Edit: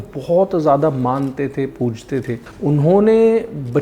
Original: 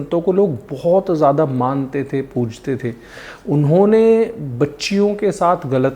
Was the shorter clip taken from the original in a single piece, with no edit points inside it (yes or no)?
no